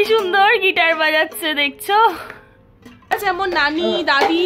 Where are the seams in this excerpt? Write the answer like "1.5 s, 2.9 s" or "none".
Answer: 3.1 s